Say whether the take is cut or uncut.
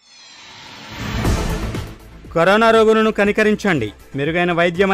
cut